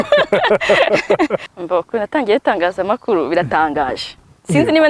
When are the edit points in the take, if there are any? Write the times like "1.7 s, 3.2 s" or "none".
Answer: 1.5 s